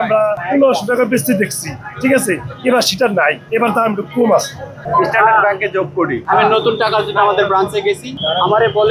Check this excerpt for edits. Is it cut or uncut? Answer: cut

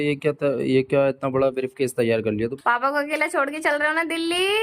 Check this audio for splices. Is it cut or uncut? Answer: cut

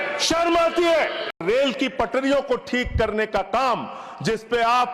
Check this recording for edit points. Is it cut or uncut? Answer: cut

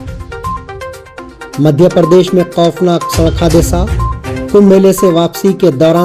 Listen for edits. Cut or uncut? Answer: cut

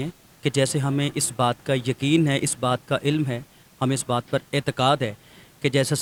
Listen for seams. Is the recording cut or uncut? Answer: uncut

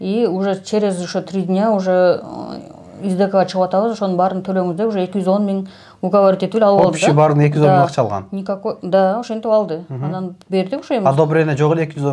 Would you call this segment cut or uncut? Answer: uncut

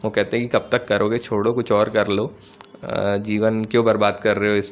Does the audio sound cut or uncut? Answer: uncut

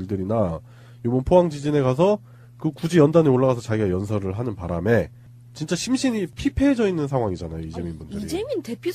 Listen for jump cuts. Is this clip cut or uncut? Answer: uncut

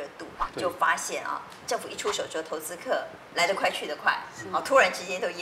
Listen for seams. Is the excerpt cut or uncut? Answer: uncut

